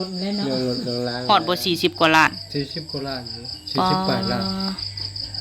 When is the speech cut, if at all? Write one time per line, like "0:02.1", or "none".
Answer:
0:01.2